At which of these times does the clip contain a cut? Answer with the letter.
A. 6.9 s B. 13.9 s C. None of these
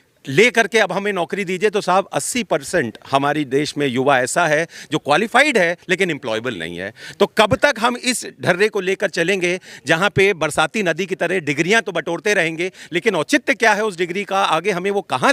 C